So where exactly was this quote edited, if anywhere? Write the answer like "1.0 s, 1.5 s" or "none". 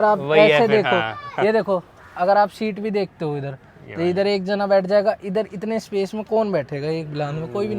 none